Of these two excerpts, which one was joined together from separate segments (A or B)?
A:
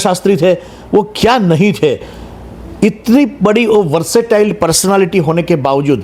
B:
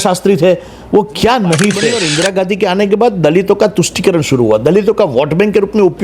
B